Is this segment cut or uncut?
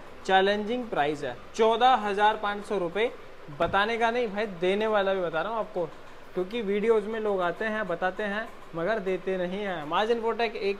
uncut